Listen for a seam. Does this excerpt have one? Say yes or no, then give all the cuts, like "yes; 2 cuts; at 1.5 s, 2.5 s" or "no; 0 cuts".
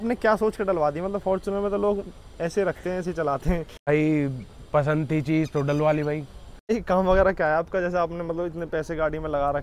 yes; 2 cuts; at 3.9 s, 6.7 s